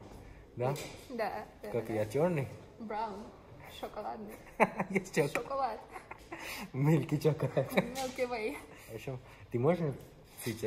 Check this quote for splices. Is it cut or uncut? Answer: uncut